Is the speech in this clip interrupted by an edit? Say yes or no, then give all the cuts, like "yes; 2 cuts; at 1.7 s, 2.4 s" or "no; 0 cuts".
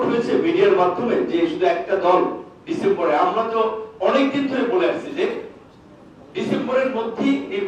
no; 0 cuts